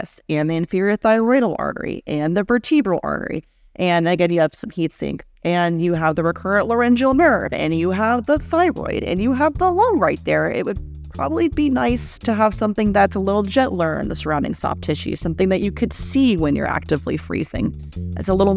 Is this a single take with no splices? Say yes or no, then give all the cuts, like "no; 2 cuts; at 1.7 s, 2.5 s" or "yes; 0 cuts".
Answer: yes; 0 cuts